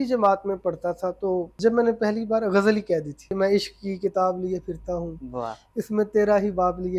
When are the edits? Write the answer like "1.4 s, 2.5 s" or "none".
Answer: 1.5 s, 3.3 s